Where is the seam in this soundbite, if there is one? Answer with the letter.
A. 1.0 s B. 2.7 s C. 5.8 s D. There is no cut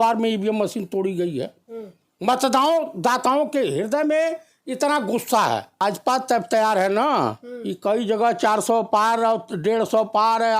C